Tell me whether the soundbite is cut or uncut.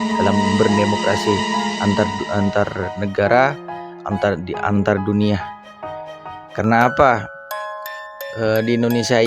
uncut